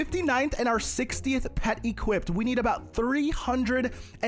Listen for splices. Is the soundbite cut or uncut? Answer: uncut